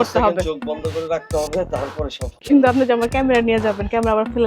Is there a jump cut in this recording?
yes; 1 cut; at 2.4 s

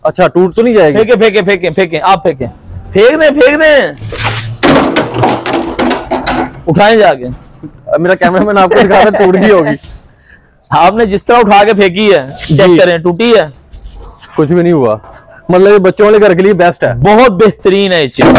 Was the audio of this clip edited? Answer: no; 0 cuts

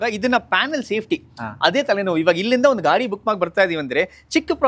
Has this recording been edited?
no; 0 cuts

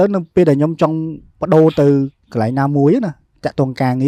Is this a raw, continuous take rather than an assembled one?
yes; 0 cuts

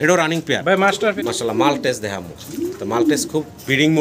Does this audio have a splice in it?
yes; 1 cut; at 1.2 s

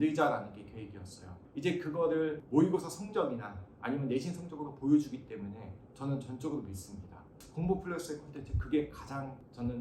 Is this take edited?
yes; 2 cuts; at 1.4 s, 7.4 s

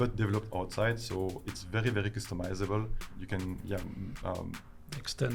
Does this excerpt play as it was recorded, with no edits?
no; 1 cut; at 3.2 s

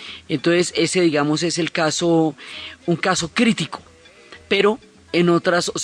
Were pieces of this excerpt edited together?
yes; 1 cut; at 1.5 s

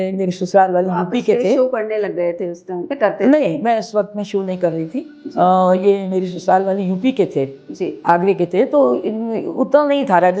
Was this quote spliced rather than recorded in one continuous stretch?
no; 0 cuts

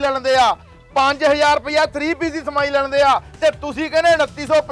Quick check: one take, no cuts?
yes; 0 cuts

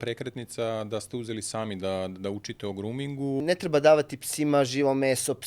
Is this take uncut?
no; 1 cut; at 3.4 s

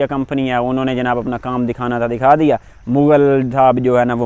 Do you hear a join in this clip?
no; 0 cuts

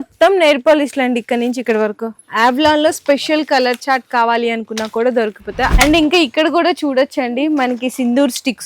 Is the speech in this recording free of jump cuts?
yes; 0 cuts

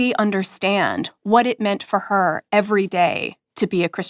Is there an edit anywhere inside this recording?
no; 0 cuts

